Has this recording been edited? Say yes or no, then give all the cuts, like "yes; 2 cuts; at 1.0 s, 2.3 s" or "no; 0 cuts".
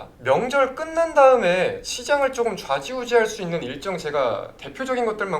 no; 0 cuts